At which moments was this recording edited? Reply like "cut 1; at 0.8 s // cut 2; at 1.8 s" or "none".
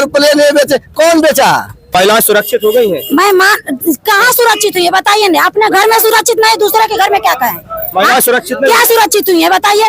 cut 1; at 1.8 s

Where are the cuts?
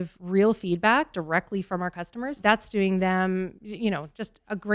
cut 1; at 2.3 s

